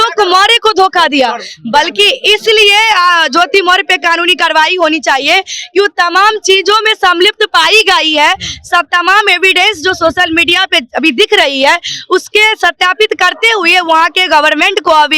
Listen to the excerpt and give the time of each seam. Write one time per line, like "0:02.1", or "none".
none